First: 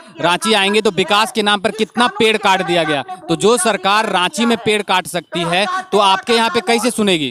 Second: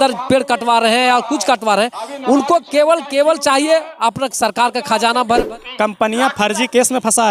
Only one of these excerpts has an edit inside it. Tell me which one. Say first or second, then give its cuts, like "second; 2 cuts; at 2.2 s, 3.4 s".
second; 1 cut; at 5.4 s